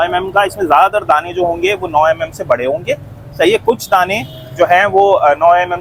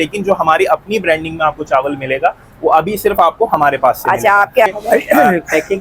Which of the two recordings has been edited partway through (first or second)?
second